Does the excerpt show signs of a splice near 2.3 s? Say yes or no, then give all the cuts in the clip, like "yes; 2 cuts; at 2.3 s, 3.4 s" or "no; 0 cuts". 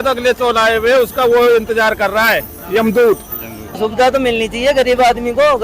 no; 1 cut; at 3.8 s